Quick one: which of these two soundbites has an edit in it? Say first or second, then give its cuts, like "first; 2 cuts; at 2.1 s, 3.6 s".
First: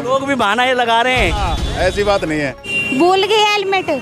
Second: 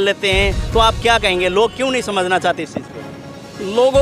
first; 1 cut; at 2.7 s